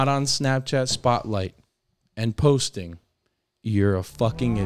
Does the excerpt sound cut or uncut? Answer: uncut